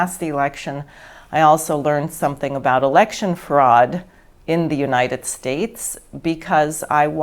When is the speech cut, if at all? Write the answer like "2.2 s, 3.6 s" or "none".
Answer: none